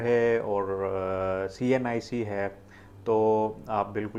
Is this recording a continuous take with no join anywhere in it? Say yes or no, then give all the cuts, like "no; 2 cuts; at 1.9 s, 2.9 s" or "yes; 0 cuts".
yes; 0 cuts